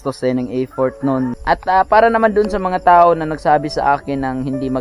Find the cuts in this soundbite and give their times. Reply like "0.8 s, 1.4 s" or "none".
1.3 s

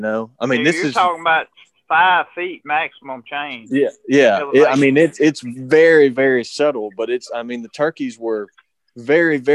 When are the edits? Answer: none

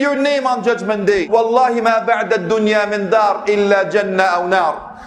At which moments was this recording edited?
1.2 s

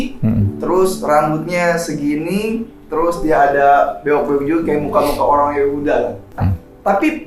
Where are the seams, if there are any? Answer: 6.1 s

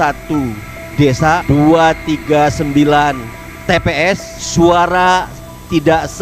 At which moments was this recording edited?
1.4 s, 4.3 s

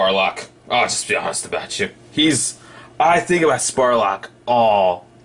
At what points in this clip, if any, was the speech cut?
none

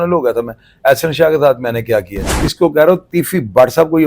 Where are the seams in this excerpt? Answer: 2.5 s

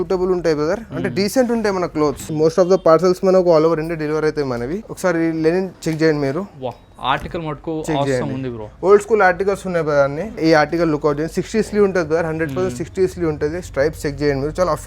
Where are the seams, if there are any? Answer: 2.3 s, 4.9 s, 5.8 s, 10.4 s

